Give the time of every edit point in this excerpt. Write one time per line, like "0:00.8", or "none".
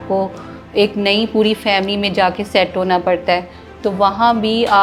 none